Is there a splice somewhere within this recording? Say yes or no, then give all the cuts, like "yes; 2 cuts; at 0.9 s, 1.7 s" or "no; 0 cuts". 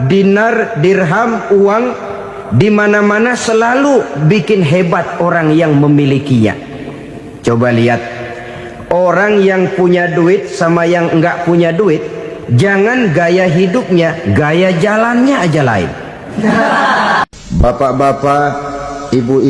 yes; 1 cut; at 17.2 s